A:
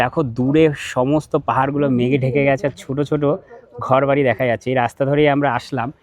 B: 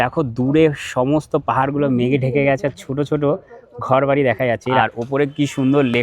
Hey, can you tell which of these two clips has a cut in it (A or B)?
B